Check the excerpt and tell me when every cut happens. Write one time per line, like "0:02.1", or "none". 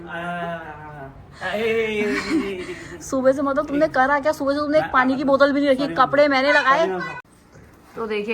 0:07.1